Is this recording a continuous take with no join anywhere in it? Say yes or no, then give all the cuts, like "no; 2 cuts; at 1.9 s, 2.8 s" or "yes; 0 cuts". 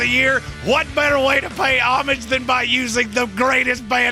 yes; 0 cuts